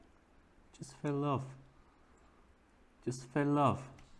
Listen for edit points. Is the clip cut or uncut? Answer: uncut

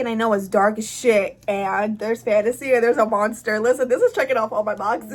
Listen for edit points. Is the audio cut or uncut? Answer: uncut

